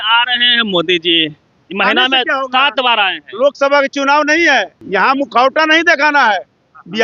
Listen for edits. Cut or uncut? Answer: cut